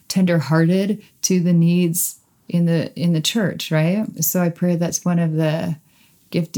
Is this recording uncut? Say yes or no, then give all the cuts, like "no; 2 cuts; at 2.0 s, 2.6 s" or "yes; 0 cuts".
no; 1 cut; at 4.2 s